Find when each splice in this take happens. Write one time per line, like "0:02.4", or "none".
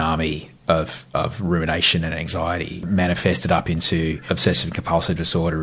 0:02.8
0:04.2

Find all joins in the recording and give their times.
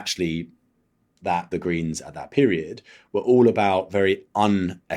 0:01.5

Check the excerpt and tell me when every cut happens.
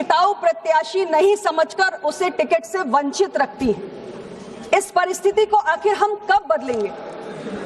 0:02.2

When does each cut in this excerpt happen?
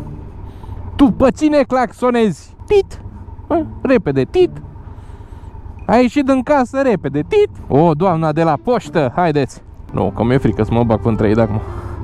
0:09.9

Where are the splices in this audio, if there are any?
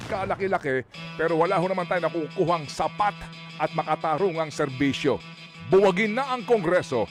none

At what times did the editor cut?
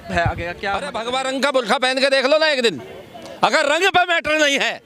0:00.9

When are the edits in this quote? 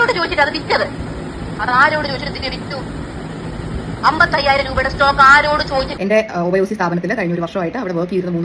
0:05.9

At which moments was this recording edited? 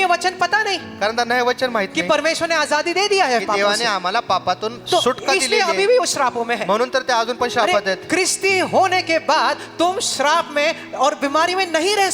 none

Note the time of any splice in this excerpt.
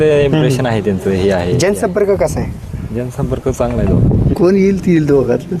0:04.3

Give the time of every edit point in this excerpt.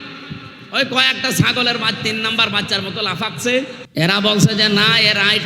0:03.8

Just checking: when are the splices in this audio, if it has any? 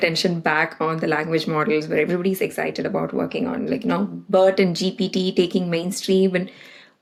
none

